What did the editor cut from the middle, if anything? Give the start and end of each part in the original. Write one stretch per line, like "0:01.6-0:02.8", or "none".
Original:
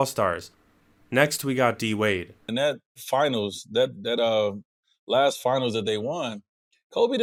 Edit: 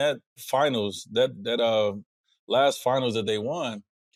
none